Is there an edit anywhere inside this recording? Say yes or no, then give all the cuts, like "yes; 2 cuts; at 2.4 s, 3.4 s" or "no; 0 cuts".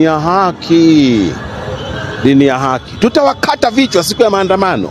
no; 0 cuts